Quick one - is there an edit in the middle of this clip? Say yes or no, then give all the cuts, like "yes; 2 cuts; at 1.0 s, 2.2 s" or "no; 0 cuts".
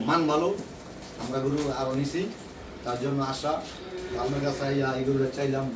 no; 0 cuts